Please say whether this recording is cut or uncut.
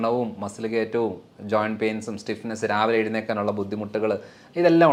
uncut